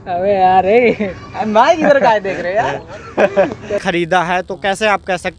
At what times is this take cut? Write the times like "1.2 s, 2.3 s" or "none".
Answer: 3.8 s